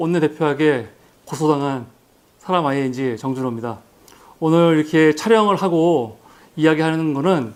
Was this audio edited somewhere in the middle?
no; 0 cuts

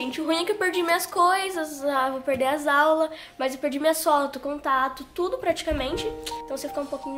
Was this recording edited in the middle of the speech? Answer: no; 0 cuts

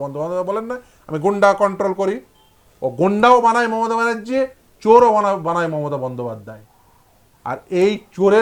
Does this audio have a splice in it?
no; 0 cuts

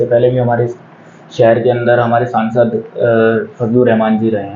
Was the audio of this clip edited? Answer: no; 0 cuts

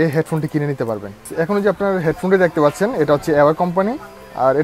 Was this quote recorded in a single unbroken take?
no; 1 cut; at 1.3 s

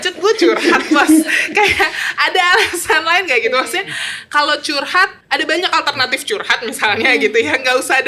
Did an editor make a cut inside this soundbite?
yes; 1 cut; at 5.2 s

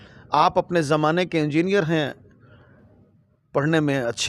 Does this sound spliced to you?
no; 0 cuts

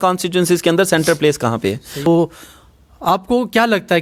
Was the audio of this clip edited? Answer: no; 0 cuts

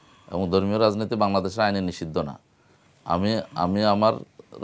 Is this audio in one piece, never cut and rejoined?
yes; 0 cuts

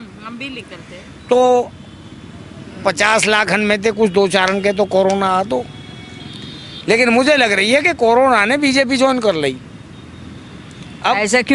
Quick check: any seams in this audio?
no; 0 cuts

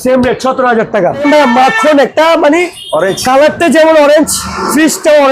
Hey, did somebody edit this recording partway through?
no; 0 cuts

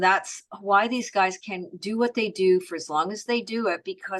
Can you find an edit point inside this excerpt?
no; 0 cuts

